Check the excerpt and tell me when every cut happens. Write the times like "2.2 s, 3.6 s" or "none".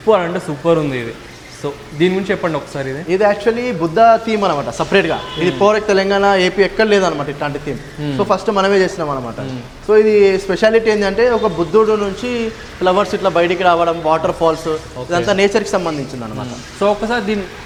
none